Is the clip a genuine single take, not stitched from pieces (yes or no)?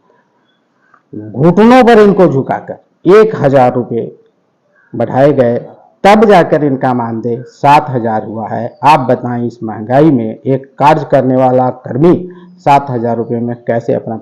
no